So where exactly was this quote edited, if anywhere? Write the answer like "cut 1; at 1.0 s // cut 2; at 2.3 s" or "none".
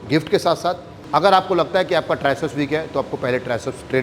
cut 1; at 0.9 s

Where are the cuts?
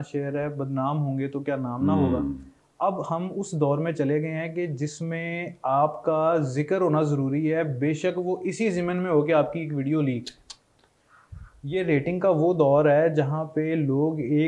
none

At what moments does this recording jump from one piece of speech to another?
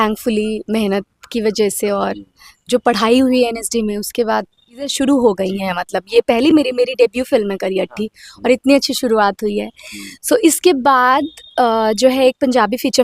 cut 1; at 4.9 s

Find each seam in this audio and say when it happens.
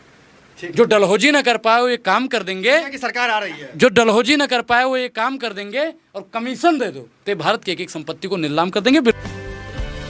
cut 1; at 9.1 s

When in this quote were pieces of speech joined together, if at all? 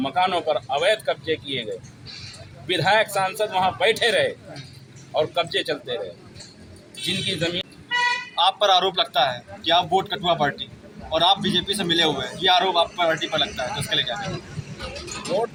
none

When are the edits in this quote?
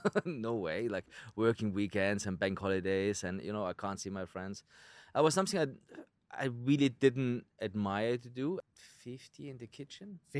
cut 1; at 8.6 s

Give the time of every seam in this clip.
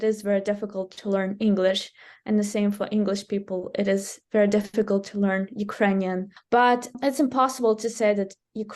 cut 1; at 6.3 s // cut 2; at 7.0 s

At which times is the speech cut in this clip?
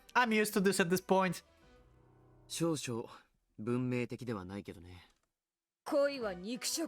none

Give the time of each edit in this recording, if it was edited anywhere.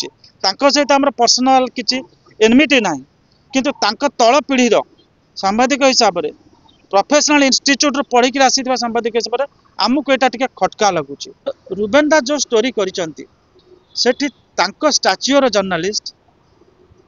cut 1; at 11.6 s

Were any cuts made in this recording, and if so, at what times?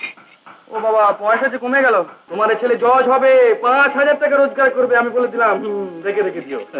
cut 1; at 2.2 s

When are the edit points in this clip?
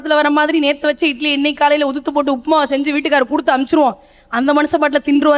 none

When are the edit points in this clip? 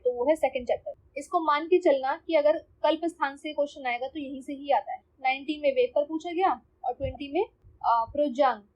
cut 1; at 1.0 s

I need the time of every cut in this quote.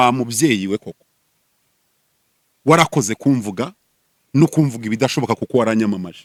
none

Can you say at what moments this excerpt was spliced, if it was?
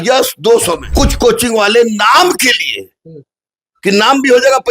cut 1; at 0.9 s

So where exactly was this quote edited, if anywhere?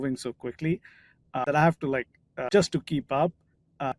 cut 1; at 1.4 s // cut 2; at 2.3 s

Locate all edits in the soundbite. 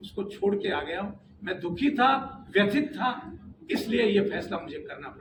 none

